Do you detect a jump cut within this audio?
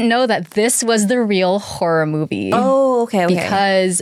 no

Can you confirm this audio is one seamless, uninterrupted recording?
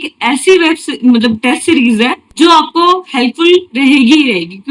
no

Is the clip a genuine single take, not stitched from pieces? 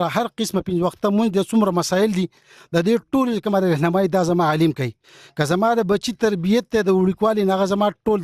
yes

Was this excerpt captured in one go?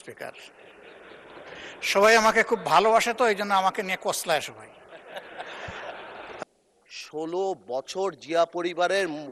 no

